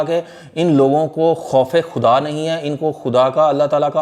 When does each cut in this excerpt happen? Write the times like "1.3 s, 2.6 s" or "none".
none